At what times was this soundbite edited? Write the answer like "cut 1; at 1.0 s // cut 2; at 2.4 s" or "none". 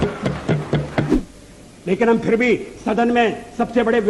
cut 1; at 1.1 s